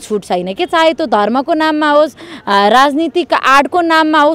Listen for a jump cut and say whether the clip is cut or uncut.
uncut